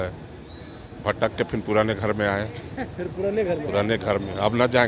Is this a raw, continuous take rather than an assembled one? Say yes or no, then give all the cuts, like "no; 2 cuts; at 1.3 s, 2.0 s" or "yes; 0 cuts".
yes; 0 cuts